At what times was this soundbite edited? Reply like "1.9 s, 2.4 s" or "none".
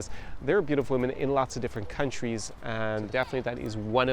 3.1 s